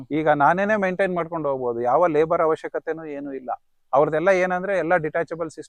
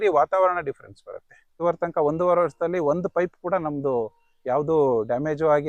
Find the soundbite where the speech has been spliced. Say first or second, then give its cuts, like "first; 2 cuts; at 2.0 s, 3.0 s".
second; 1 cut; at 1.6 s